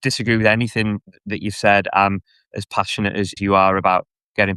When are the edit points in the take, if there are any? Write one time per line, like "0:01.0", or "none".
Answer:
0:01.1
0:03.3